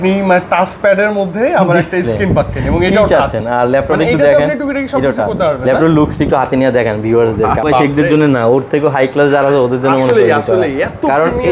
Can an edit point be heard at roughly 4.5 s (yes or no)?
no